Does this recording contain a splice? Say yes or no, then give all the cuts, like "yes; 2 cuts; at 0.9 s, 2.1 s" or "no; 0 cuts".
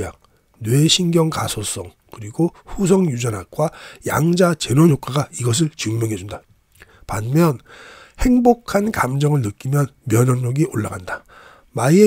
yes; 1 cut; at 6.3 s